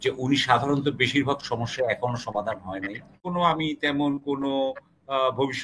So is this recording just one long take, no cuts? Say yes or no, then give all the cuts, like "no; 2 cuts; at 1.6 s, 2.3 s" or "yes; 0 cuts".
no; 1 cut; at 3.2 s